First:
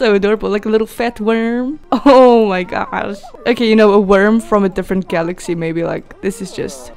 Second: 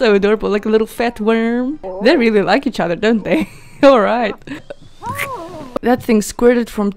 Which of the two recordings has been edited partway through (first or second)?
second